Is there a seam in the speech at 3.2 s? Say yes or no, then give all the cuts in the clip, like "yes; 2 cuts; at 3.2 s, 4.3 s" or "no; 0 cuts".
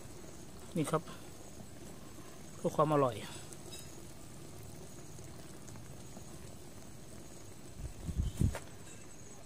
no; 1 cut; at 8.5 s